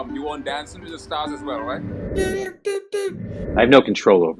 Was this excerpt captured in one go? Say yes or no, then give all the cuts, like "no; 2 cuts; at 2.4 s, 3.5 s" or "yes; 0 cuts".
no; 1 cut; at 3.4 s